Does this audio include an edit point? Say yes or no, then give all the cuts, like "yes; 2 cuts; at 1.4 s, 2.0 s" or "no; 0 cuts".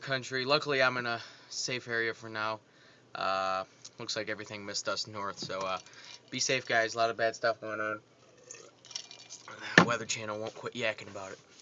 yes; 1 cut; at 9.5 s